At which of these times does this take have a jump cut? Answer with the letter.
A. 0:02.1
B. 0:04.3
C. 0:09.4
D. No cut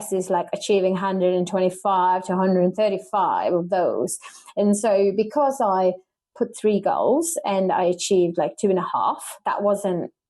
C